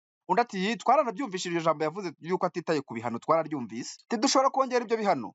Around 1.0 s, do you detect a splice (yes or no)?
no